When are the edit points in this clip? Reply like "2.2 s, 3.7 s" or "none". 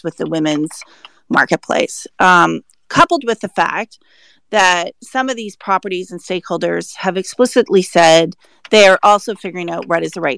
none